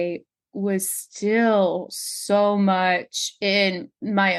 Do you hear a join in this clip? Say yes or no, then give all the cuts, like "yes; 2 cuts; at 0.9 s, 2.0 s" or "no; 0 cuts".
no; 0 cuts